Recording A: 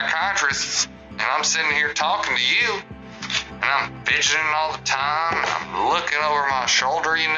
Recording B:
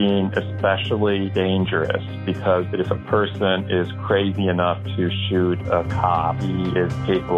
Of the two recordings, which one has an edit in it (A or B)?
B